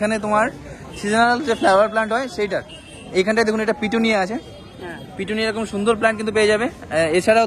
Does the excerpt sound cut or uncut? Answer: uncut